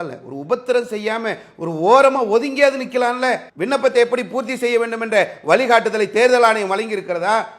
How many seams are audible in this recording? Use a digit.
1